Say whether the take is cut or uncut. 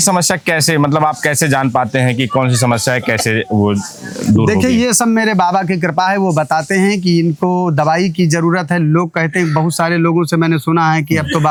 uncut